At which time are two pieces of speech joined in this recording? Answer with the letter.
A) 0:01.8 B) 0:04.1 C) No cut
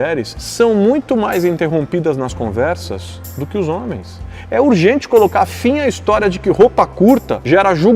B